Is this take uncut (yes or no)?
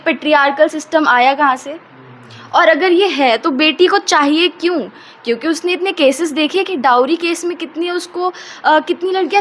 yes